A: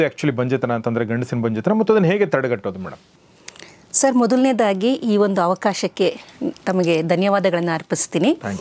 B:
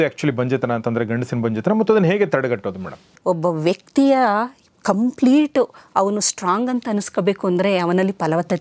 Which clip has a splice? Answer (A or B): B